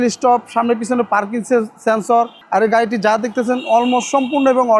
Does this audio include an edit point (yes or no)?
yes